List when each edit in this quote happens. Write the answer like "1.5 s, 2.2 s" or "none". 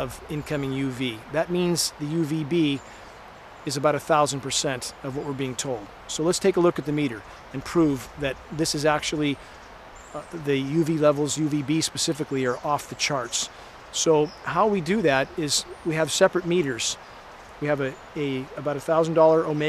none